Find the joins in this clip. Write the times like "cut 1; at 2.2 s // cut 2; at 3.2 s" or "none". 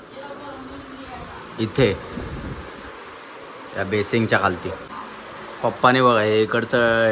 cut 1; at 4.8 s

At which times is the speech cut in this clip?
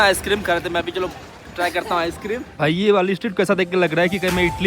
cut 1; at 2.6 s

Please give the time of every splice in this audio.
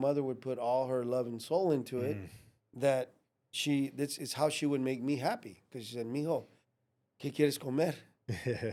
none

